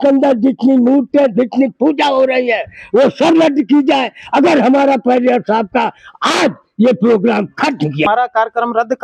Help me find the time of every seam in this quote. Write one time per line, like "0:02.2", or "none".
0:08.0